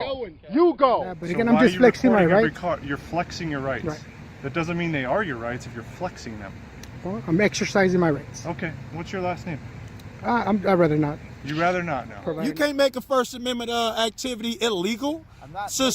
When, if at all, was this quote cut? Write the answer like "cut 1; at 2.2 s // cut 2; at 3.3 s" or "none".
cut 1; at 1.2 s // cut 2; at 12.2 s